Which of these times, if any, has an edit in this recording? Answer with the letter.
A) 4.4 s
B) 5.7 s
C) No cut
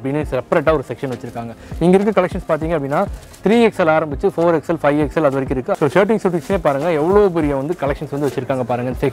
B